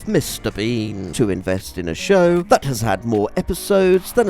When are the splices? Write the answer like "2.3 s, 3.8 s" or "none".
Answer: 1.1 s